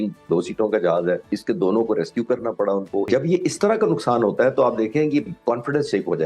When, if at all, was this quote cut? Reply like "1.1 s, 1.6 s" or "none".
1.3 s, 3.1 s

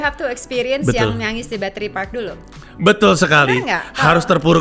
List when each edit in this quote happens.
none

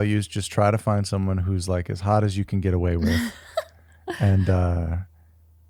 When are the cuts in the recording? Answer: none

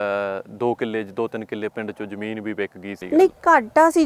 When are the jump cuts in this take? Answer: 2.9 s

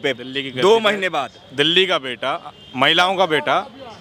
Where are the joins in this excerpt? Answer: none

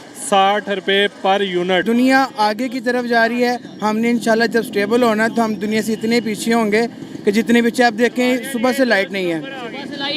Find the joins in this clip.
1.8 s

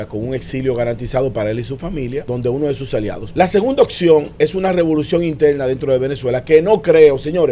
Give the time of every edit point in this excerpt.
2.3 s, 3.2 s

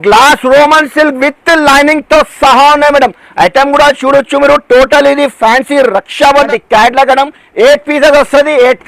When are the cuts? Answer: 6.5 s

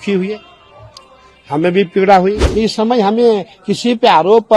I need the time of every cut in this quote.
2.4 s

